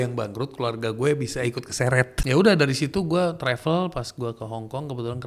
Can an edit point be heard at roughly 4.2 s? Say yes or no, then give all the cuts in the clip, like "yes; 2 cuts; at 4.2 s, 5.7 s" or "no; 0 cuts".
no; 1 cut; at 2.2 s